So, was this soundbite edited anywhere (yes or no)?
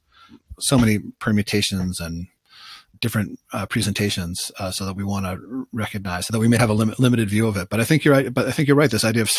yes